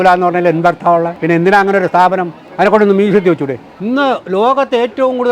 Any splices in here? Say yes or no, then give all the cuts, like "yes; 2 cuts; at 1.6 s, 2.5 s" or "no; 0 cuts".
yes; 3 cuts; at 1.1 s, 2.4 s, 3.7 s